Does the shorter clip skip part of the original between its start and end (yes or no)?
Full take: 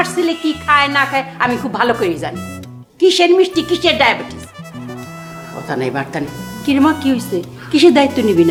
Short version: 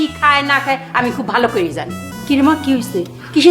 yes